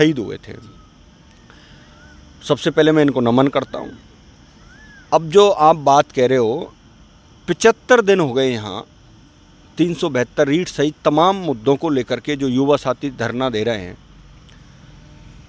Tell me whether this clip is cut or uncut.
uncut